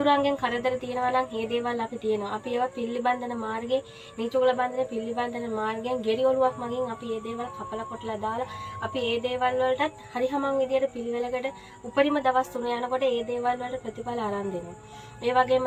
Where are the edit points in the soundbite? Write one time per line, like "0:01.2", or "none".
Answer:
none